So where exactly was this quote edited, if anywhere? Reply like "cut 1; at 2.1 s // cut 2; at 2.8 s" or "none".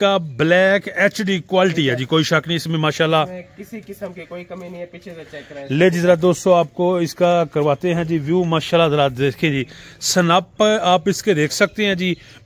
none